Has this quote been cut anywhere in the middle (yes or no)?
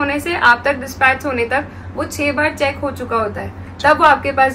no